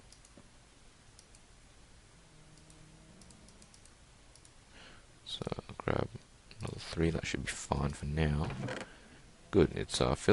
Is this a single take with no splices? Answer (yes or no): yes